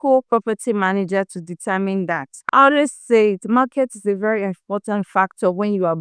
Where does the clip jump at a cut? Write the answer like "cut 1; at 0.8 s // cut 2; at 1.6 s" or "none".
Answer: cut 1; at 2.3 s